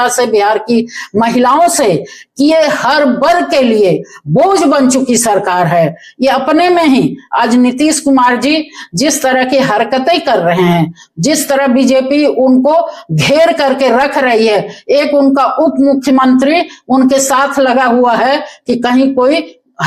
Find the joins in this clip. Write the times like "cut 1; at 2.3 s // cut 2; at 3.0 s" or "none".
none